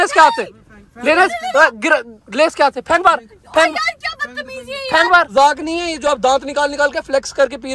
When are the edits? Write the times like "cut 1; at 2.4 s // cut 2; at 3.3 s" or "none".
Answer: cut 1; at 5.3 s

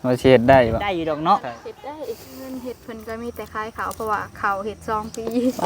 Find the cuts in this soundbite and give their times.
cut 1; at 1.0 s // cut 2; at 2.8 s

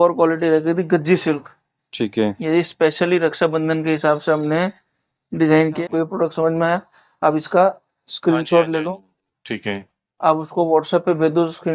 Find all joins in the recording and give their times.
cut 1; at 5.8 s

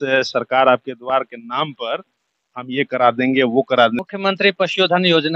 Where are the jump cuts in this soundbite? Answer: cut 1; at 4.0 s

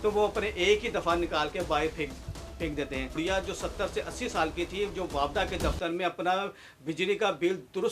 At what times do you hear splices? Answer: cut 1; at 3.2 s

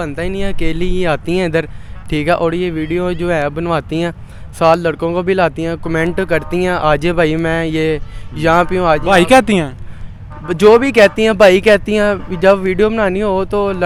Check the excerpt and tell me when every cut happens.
none

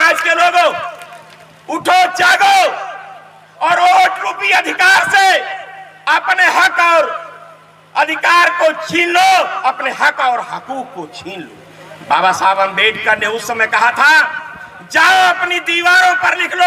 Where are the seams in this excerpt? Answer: none

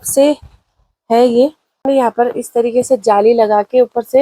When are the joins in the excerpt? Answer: cut 1; at 1.7 s

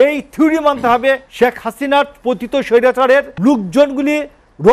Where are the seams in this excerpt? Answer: cut 1; at 1.3 s // cut 2; at 3.3 s

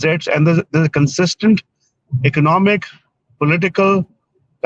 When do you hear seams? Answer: none

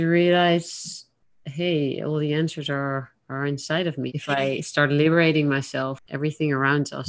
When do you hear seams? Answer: cut 1; at 4.1 s // cut 2; at 6.0 s

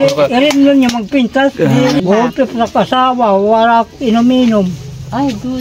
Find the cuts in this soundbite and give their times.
cut 1; at 2.2 s

